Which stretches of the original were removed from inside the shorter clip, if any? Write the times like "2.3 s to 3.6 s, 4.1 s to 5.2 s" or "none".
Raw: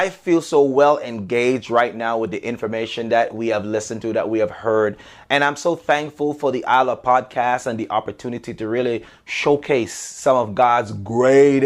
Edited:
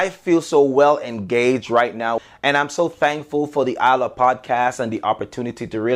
2.2 s to 5.0 s